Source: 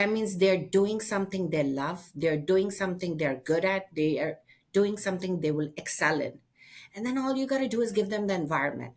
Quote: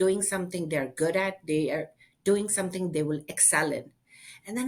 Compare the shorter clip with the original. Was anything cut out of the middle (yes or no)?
no